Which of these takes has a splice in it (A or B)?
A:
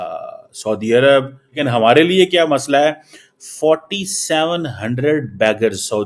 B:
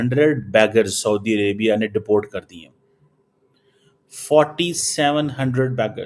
A